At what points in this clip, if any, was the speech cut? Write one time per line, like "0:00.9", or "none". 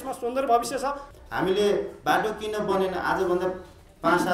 0:01.1